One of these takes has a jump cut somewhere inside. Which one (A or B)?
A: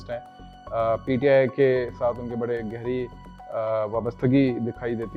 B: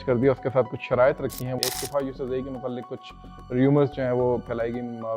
B